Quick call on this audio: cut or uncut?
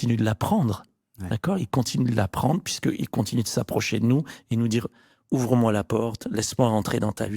uncut